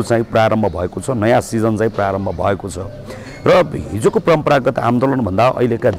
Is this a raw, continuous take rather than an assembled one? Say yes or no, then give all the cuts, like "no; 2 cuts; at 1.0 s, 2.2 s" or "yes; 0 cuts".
yes; 0 cuts